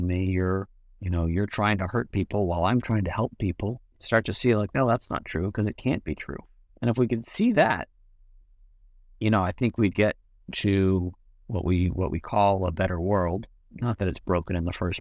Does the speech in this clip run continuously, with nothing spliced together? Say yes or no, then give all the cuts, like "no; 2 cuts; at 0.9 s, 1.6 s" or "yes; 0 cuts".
no; 1 cut; at 3.9 s